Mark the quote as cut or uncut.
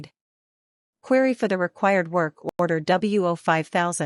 uncut